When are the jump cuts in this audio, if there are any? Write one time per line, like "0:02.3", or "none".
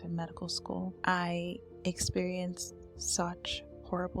0:01.0